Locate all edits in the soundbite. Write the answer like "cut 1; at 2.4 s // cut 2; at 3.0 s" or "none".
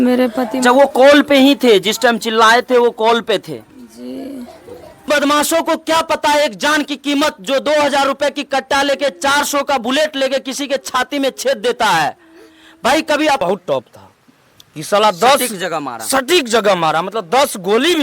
cut 1; at 5.1 s // cut 2; at 13.4 s